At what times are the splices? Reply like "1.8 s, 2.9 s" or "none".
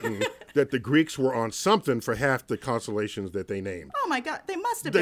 none